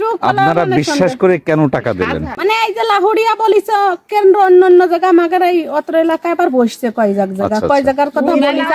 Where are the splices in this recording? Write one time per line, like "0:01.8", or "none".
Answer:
0:02.3